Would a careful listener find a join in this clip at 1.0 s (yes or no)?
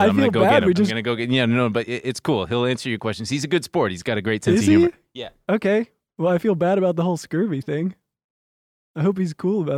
yes